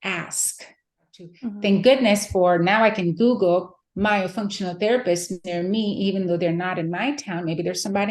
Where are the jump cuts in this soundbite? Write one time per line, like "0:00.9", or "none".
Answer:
0:01.4